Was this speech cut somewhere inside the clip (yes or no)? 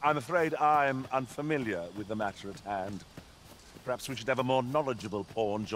no